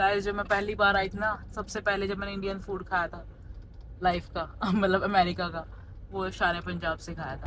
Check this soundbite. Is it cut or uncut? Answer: uncut